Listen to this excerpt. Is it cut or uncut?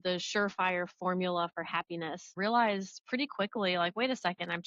cut